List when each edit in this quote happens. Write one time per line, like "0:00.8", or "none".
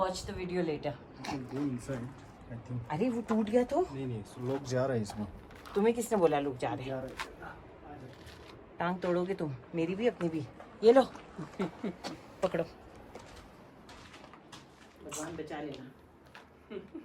none